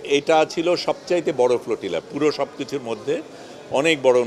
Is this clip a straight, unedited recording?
yes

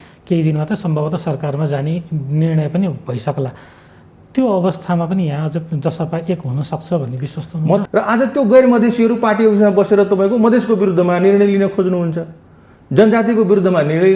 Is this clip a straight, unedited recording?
no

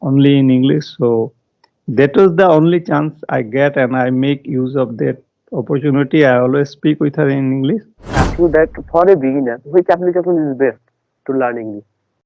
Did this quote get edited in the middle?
yes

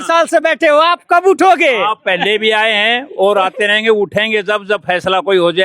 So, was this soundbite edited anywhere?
no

